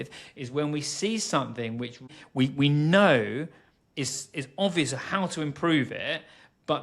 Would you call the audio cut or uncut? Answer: cut